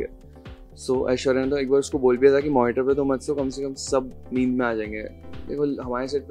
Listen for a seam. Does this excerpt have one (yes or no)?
yes